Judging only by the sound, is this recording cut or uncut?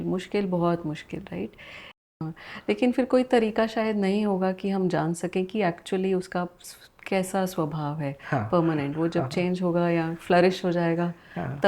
cut